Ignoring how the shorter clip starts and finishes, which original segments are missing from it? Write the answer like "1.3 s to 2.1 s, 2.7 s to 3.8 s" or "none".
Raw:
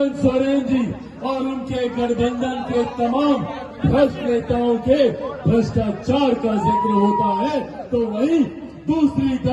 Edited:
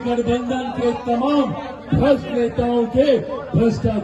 none